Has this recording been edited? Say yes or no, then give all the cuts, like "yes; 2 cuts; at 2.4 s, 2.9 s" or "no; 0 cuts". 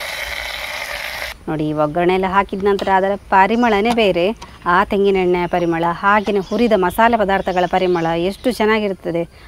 yes; 1 cut; at 1.3 s